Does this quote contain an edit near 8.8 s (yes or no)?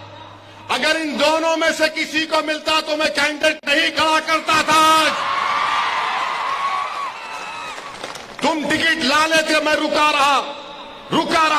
no